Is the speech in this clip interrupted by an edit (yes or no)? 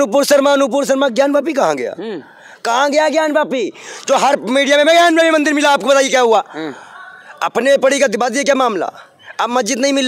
no